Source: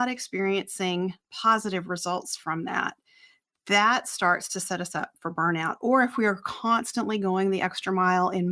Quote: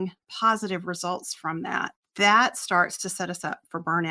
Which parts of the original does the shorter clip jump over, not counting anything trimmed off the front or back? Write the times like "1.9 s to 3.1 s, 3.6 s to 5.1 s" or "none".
3.0 s to 3.5 s